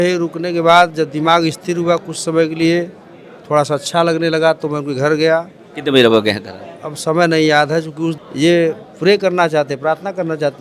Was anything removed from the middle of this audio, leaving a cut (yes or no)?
yes